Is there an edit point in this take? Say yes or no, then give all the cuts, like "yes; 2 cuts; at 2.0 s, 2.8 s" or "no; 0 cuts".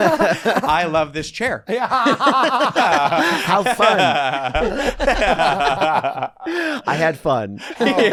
no; 0 cuts